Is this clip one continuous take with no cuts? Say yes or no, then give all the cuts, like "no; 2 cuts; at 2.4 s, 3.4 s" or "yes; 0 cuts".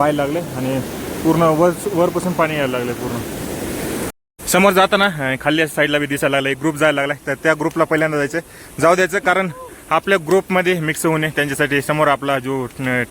no; 1 cut; at 4.3 s